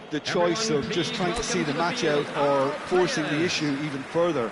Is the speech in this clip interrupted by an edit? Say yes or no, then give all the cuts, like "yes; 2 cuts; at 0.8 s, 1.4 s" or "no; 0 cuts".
no; 0 cuts